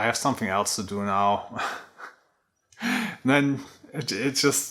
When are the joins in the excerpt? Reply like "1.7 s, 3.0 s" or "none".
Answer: none